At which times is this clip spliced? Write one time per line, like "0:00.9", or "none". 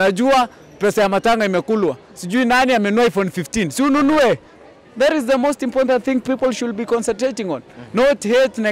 none